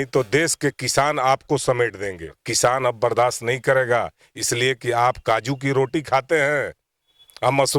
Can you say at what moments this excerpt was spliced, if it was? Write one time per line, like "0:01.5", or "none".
0:02.5

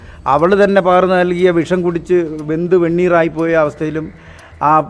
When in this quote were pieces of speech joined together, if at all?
none

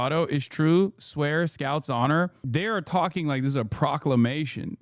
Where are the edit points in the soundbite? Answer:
0:02.4

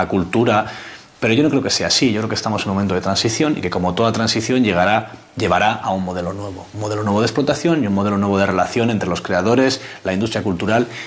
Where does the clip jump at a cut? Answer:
none

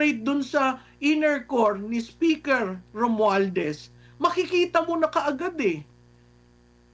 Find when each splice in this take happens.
none

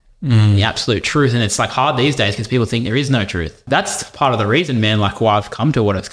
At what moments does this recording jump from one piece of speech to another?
0:03.6

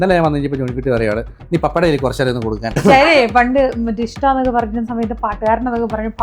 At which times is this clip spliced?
0:02.7

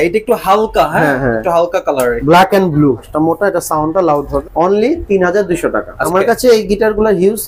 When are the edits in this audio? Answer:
0:02.2
0:03.1
0:04.4
0:05.9

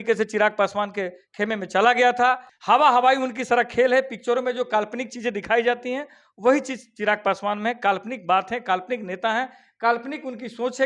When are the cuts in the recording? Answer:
0:02.5

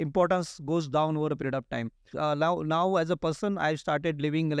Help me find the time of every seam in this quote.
0:02.1

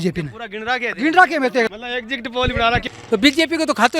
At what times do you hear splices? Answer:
0:01.7
0:02.9

